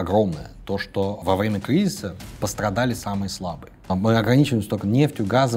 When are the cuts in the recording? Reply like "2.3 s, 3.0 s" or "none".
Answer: 1.2 s, 3.9 s